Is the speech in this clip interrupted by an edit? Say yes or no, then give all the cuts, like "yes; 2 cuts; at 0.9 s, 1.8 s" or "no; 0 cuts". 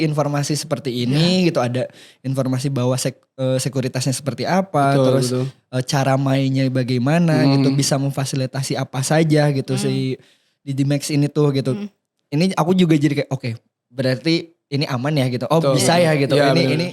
no; 0 cuts